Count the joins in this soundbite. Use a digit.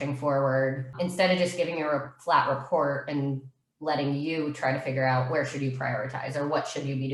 1